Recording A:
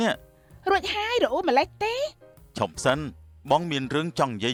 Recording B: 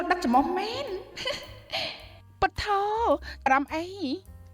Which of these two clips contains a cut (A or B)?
B